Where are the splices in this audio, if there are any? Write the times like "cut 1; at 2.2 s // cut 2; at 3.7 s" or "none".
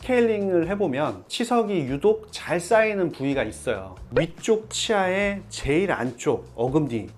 none